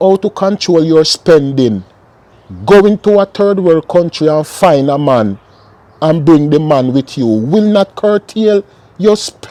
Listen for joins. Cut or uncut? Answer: uncut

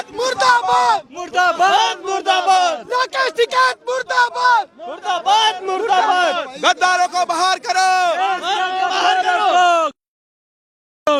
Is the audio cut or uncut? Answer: uncut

